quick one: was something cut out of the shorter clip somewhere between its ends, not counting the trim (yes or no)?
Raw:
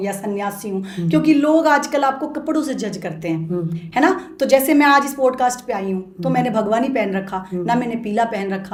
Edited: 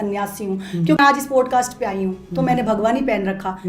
yes